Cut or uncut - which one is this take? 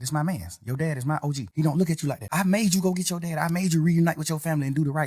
uncut